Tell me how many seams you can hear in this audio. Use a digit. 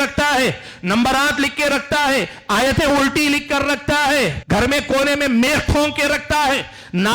1